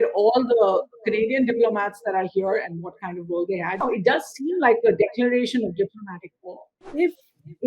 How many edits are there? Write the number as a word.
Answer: two